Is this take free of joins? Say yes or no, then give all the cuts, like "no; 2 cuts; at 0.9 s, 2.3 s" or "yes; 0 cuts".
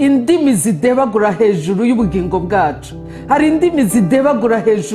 yes; 0 cuts